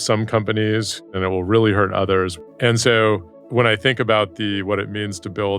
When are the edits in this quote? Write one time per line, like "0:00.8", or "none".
0:01.0
0:02.3
0:03.4